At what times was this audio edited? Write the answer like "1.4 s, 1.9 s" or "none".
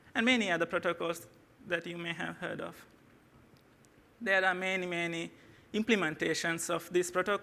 4.3 s